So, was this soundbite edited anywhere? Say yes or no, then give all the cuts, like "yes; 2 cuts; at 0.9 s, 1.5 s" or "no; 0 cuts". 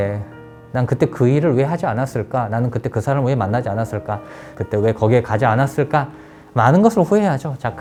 no; 0 cuts